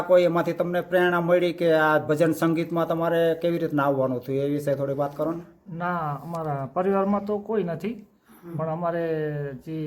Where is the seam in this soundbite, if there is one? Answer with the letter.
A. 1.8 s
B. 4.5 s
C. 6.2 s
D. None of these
D